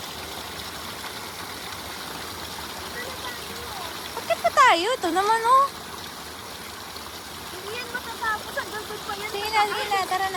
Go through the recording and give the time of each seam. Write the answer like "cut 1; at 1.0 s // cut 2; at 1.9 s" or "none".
none